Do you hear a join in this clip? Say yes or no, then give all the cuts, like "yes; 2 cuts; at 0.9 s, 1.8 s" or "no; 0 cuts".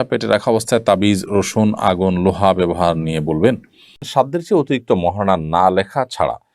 yes; 1 cut; at 4.0 s